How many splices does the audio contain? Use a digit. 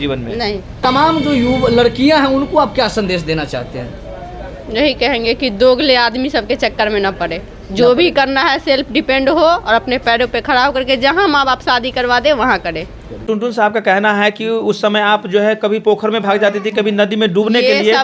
2